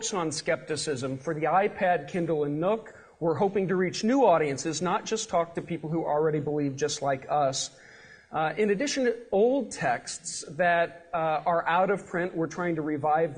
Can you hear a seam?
no; 0 cuts

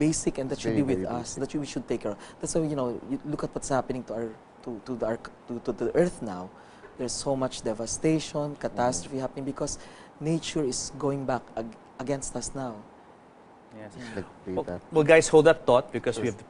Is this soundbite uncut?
no; 1 cut; at 12.3 s

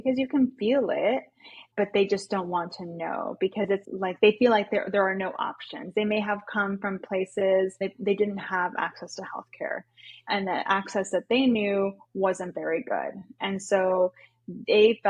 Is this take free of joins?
no; 3 cuts; at 1.5 s, 3.9 s, 8.1 s

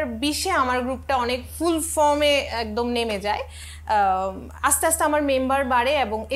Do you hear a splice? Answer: no; 0 cuts

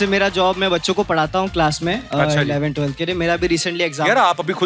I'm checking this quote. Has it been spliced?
no; 0 cuts

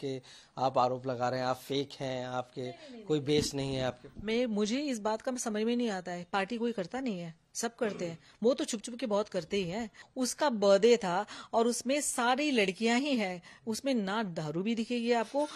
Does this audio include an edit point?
yes; 1 cut; at 10.0 s

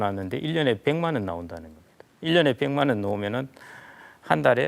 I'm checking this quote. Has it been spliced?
no; 0 cuts

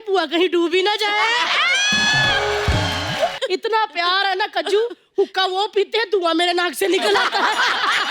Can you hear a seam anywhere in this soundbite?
yes; 1 cut; at 3.4 s

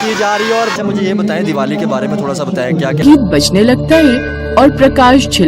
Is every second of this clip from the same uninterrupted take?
no; 1 cut; at 3.0 s

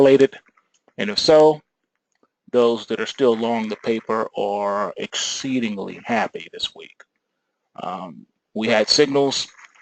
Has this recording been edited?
yes; 1 cut; at 4.2 s

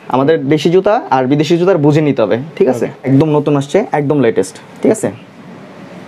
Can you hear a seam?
no; 0 cuts

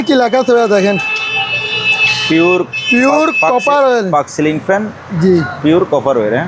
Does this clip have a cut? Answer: no; 0 cuts

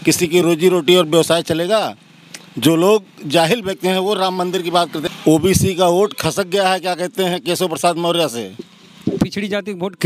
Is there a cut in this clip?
yes; 1 cut; at 5.0 s

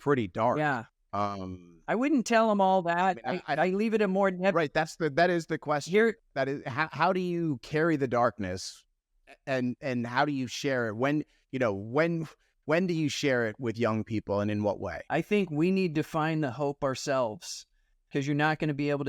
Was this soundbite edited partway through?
no; 0 cuts

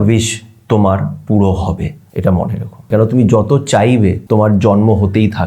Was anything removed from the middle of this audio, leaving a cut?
yes; 3 cuts; at 2.0 s, 2.9 s, 4.2 s

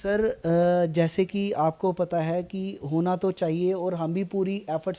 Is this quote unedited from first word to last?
yes; 0 cuts

